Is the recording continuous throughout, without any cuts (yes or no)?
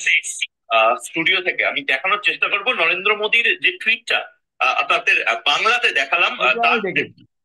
yes